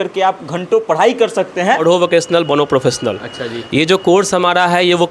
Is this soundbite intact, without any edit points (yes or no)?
no